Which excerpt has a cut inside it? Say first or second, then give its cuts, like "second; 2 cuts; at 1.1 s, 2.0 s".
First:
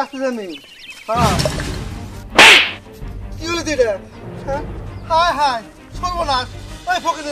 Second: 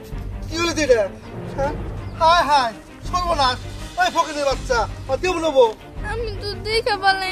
second; 1 cut; at 5.8 s